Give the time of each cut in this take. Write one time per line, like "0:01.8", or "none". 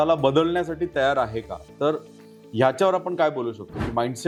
none